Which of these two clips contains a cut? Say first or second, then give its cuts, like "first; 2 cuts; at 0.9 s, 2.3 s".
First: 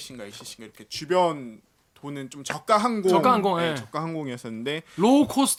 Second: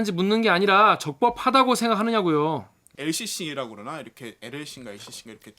second; 1 cut; at 2.8 s